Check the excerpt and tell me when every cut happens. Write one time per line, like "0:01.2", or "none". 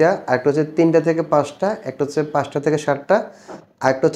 none